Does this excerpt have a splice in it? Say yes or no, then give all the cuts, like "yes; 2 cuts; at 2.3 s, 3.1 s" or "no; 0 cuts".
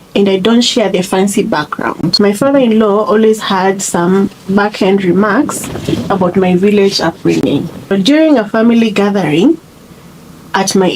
yes; 3 cuts; at 2.1 s, 4.4 s, 7.9 s